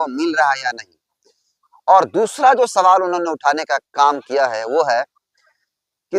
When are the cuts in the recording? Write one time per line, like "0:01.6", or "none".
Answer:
none